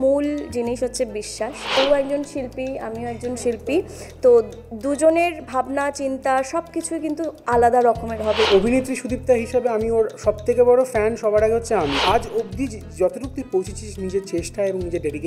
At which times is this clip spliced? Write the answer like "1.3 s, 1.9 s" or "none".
1.8 s, 8.5 s, 12.0 s